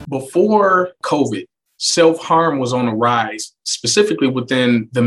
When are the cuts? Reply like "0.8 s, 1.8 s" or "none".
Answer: 1.0 s